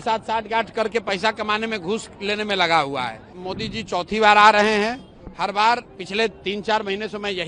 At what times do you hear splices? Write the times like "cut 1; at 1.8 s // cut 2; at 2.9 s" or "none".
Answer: cut 1; at 3.4 s